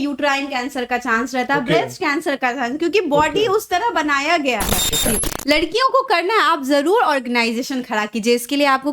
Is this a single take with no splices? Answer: no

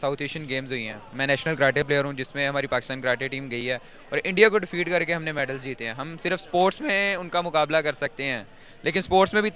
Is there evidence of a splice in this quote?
no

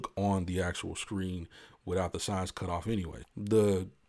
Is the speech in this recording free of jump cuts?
no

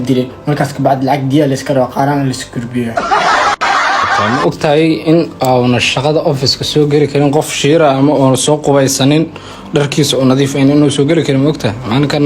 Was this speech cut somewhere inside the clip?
yes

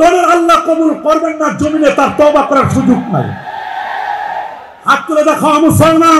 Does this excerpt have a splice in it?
no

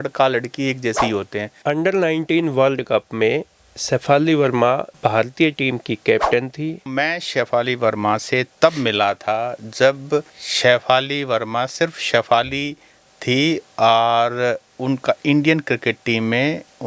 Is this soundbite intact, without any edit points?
no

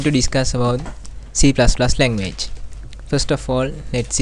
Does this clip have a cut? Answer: no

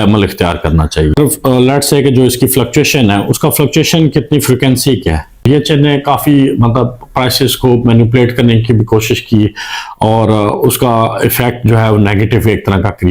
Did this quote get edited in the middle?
yes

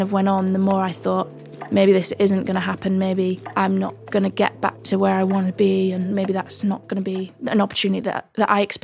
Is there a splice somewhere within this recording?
no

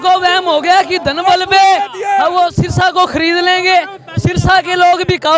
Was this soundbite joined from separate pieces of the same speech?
no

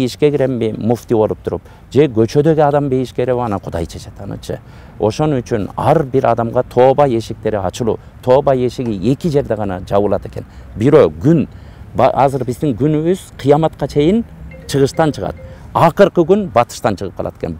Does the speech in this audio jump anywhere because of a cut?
no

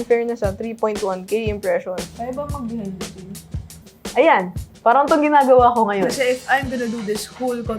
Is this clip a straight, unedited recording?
no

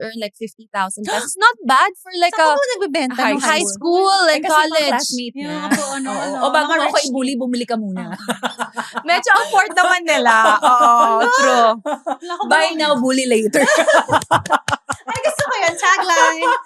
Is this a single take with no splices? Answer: yes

